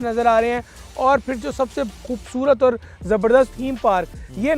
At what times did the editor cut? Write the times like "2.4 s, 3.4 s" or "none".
3.5 s